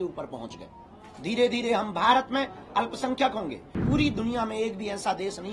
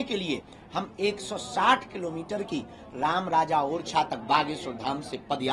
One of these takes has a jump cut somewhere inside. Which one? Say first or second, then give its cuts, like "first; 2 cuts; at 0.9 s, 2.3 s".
first; 1 cut; at 3.8 s